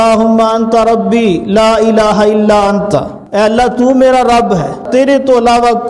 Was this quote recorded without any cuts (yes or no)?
no